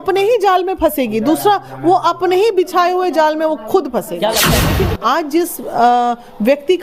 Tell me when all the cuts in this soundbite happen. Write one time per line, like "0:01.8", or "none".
0:04.7